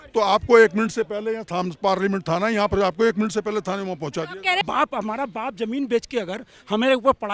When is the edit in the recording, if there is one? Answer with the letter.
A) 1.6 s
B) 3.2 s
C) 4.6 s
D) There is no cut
C